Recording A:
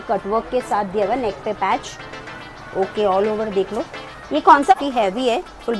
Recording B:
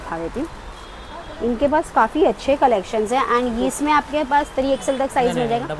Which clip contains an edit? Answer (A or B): A